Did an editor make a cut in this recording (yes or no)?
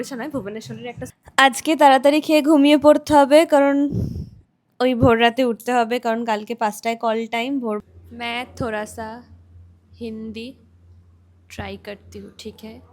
yes